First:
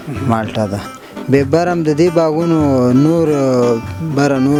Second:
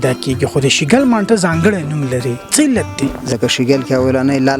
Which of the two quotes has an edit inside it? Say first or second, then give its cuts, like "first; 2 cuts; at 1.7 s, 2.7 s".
second; 1 cut; at 3.2 s